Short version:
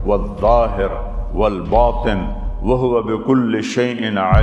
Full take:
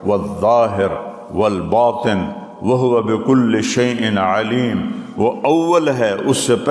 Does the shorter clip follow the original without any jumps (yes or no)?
yes